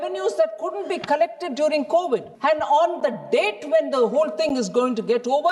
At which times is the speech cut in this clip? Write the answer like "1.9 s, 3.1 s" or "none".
2.3 s